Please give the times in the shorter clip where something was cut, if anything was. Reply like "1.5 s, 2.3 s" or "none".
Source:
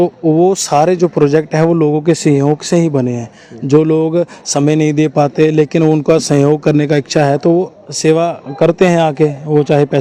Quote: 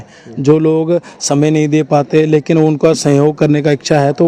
none